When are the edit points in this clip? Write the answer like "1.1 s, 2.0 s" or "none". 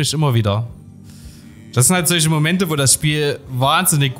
none